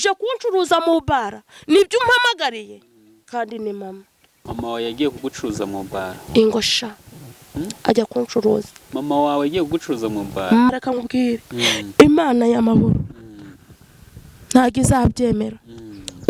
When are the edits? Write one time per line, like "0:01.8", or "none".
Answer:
0:04.4
0:10.7